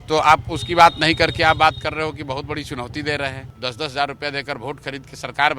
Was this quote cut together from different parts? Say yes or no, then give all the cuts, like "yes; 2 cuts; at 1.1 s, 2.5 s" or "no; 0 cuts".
yes; 1 cut; at 3.5 s